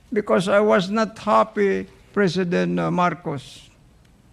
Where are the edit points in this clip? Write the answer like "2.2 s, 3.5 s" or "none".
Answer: 2.1 s

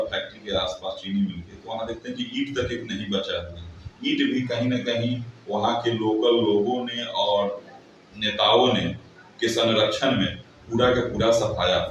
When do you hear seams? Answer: none

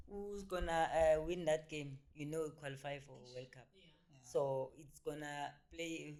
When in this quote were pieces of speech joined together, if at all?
none

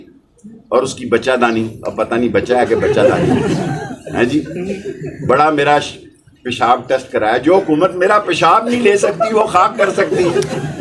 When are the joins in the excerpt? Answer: none

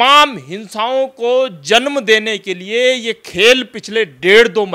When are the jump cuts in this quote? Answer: none

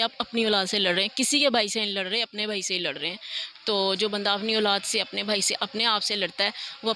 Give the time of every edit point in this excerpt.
none

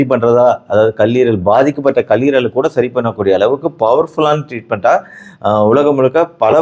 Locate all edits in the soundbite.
none

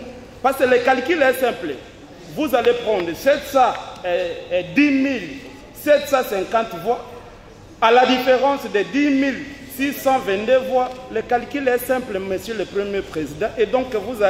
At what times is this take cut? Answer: none

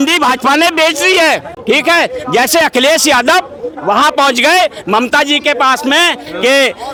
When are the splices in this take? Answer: none

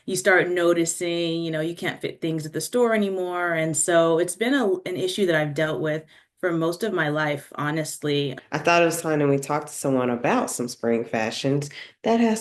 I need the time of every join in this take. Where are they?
8.4 s

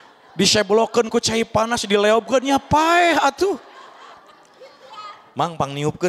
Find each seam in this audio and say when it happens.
4.1 s

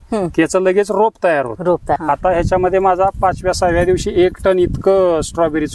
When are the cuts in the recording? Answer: 2.0 s

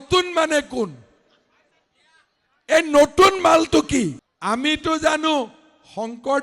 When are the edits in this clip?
4.1 s

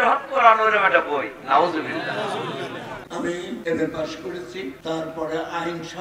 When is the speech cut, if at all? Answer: 3.0 s, 4.8 s

